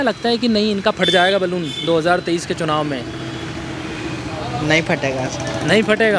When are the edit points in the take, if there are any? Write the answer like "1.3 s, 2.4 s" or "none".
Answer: none

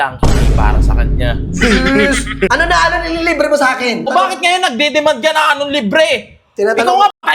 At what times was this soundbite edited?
2.5 s, 4.1 s

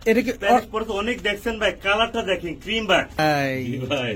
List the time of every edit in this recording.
3.2 s

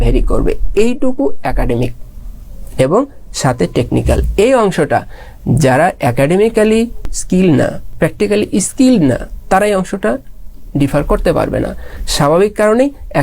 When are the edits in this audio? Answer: 7.1 s, 7.8 s

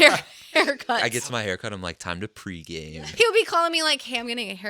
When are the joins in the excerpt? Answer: 1.0 s, 2.9 s

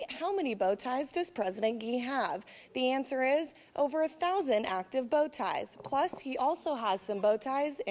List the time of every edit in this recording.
none

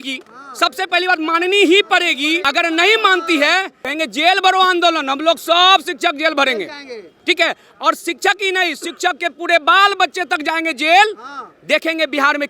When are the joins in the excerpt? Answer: 2.5 s, 3.8 s

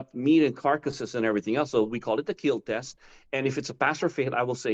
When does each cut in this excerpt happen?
none

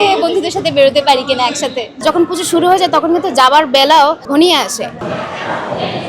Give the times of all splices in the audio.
1.9 s, 4.9 s

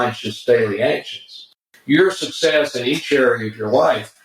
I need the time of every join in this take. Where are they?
1.6 s

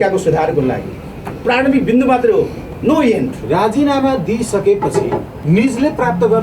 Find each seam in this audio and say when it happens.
3.4 s, 5.3 s

